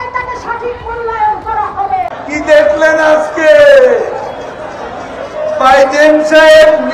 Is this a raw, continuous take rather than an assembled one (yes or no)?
no